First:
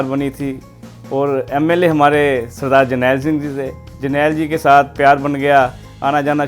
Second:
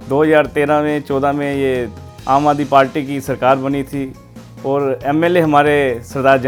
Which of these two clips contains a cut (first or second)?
first